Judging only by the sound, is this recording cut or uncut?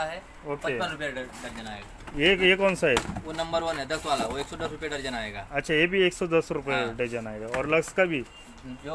uncut